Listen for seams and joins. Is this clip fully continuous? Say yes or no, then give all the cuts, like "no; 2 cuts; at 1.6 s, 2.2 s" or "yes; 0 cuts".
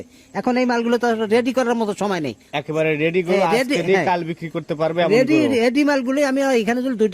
yes; 0 cuts